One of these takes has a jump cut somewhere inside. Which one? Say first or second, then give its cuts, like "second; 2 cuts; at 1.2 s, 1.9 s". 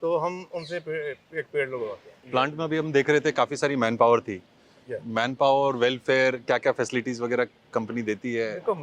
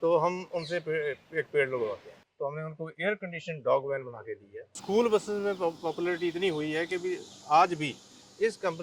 second; 2 cuts; at 2.1 s, 4.7 s